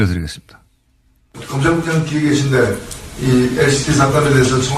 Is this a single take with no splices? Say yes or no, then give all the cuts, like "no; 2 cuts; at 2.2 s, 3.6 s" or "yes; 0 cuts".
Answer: no; 1 cut; at 1.5 s